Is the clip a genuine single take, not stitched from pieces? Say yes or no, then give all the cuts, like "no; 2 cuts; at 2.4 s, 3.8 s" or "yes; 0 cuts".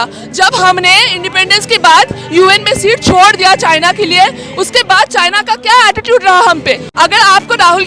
no; 1 cut; at 6.9 s